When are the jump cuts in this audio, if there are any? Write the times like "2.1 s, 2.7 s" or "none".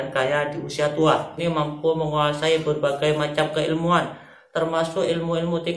1.4 s